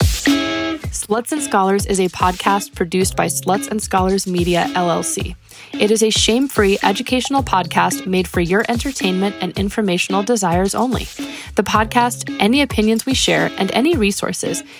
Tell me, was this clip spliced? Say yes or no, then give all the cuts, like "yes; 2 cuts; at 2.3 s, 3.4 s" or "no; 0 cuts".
yes; 1 cut; at 0.9 s